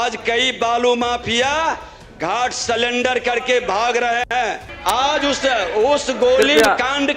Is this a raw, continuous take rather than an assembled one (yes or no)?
no